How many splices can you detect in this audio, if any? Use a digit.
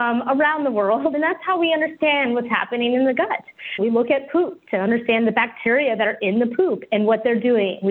1